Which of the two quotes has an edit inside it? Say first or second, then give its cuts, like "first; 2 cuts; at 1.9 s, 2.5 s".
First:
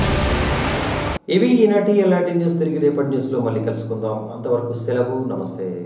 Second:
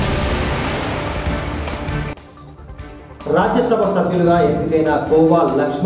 second; 1 cut; at 1.1 s